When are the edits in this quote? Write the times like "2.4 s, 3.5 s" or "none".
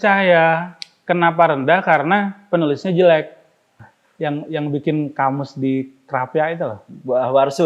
3.8 s